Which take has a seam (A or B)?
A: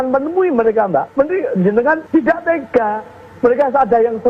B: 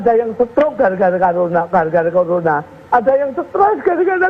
A